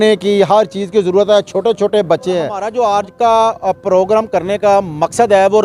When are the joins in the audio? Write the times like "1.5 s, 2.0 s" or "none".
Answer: 2.6 s